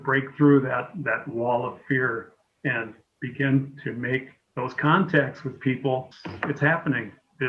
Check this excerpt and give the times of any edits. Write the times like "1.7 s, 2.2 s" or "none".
6.2 s